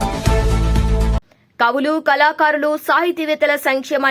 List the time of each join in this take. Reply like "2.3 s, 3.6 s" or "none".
1.2 s